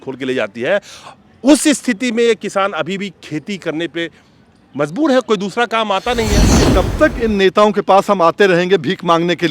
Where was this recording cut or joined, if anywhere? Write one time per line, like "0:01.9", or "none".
0:06.6